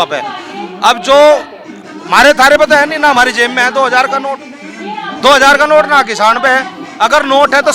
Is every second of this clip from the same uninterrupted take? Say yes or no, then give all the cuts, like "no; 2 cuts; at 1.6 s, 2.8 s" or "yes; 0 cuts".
yes; 0 cuts